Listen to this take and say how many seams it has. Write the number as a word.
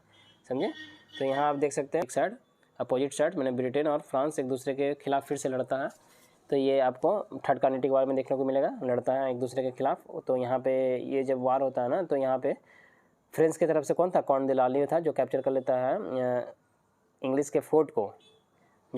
one